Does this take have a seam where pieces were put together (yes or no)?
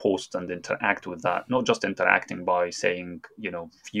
no